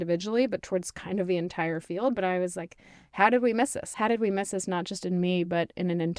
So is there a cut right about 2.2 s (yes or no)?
no